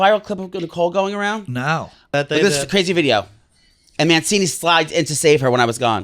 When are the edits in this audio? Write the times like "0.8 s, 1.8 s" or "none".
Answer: 2.1 s